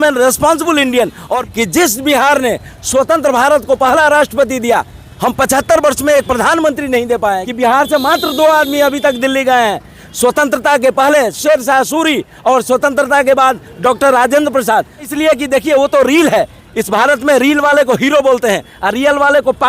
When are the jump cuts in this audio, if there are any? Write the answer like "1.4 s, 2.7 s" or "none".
1.4 s, 7.4 s, 15.1 s